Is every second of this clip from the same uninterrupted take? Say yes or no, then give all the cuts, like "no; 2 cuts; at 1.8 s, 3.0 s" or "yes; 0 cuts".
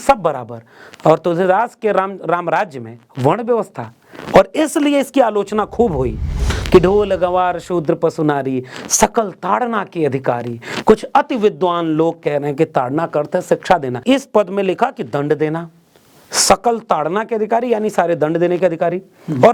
no; 2 cuts; at 6.6 s, 14.0 s